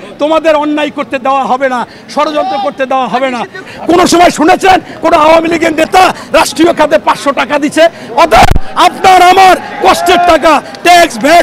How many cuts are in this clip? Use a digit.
1